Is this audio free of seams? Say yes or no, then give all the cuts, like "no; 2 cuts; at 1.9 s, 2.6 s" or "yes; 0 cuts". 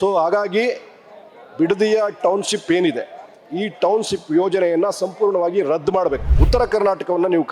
no; 1 cut; at 6.3 s